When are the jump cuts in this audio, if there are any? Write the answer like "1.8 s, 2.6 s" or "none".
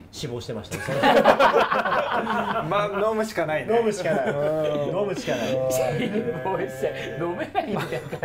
none

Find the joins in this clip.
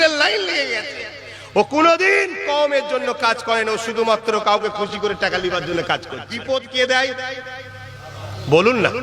6.3 s

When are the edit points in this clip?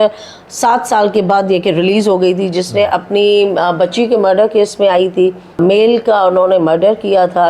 5.6 s

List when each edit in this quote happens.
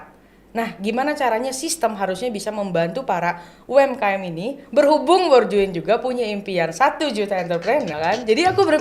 7.9 s

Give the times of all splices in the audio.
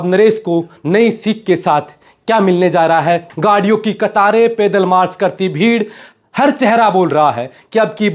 3.3 s

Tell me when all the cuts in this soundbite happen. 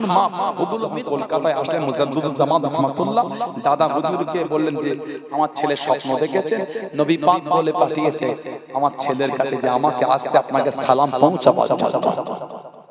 0.9 s

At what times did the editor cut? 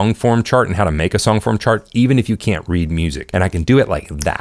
3.2 s

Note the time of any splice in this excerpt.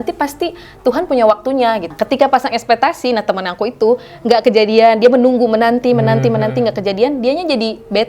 1.9 s

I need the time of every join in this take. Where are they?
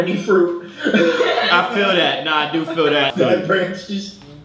3.1 s

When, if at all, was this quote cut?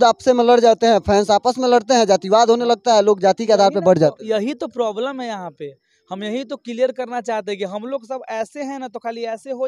none

